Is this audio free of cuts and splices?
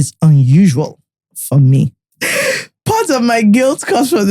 no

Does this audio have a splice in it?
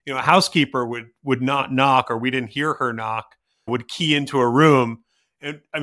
yes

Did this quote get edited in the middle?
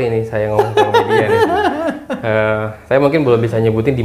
no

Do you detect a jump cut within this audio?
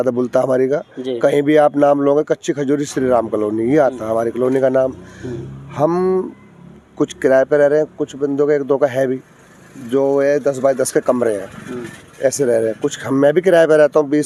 no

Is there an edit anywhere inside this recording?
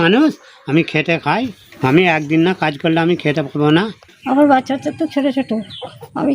yes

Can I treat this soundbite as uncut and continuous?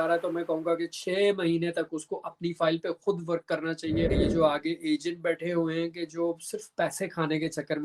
no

